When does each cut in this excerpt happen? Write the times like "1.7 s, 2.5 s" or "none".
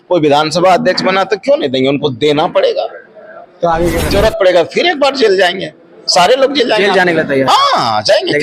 4.0 s